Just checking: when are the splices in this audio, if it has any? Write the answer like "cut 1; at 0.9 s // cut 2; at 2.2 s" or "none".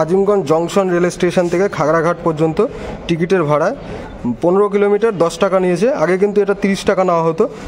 none